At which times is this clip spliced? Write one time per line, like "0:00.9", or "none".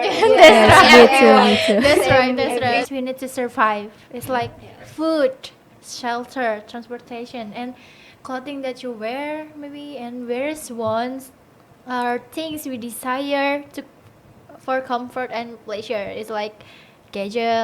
0:02.9